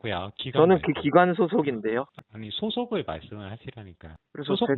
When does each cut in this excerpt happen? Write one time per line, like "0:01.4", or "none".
0:02.1